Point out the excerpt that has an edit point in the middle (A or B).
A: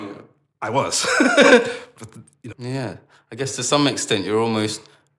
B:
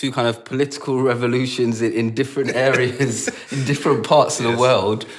A